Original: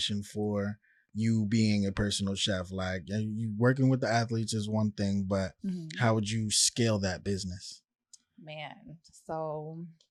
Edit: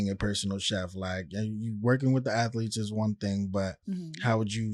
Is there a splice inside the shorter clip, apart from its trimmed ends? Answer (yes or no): no